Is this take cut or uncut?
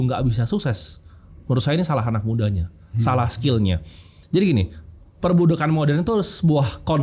cut